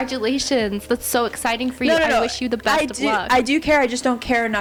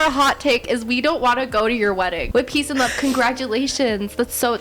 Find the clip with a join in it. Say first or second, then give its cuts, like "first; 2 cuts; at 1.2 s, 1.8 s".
second; 1 cut; at 2.2 s